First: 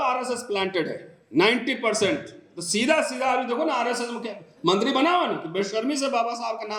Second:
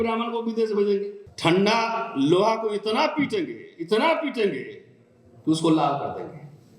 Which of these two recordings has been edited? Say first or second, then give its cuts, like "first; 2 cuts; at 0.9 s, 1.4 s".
second; 1 cut; at 1.2 s